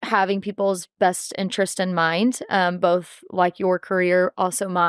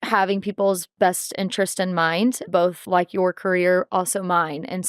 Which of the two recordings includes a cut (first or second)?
second